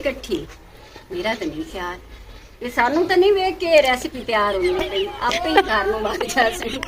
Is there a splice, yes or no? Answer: no